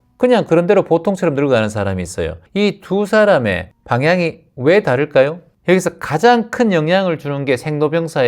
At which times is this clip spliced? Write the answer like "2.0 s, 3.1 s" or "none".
2.4 s, 3.7 s, 5.5 s